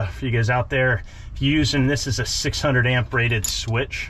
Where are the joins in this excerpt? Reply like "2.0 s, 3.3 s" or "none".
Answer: none